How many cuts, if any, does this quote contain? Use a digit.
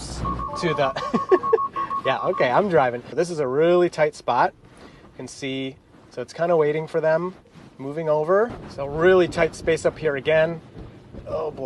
2